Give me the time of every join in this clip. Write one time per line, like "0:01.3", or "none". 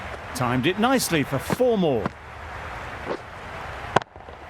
none